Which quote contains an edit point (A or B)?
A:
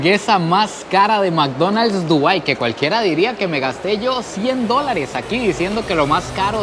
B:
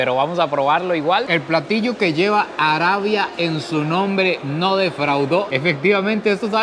B